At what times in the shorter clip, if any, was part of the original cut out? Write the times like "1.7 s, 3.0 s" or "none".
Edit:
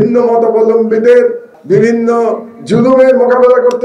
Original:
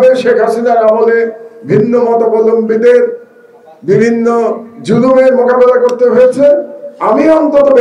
1.5 s